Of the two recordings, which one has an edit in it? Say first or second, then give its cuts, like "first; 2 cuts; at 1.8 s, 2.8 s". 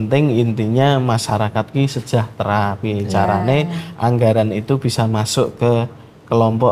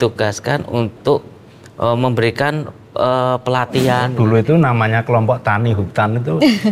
second; 1 cut; at 4.1 s